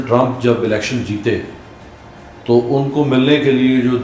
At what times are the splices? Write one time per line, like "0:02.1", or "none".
none